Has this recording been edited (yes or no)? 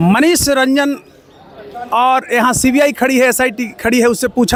no